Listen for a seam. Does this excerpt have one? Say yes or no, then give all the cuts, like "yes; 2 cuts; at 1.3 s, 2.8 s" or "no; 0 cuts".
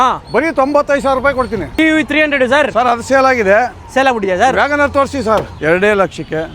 yes; 2 cuts; at 1.7 s, 5.5 s